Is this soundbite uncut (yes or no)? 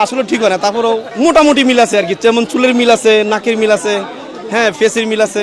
no